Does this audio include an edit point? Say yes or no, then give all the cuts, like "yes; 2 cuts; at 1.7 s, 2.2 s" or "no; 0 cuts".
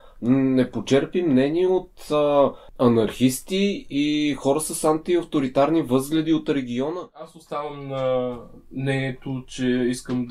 yes; 2 cuts; at 2.6 s, 7.3 s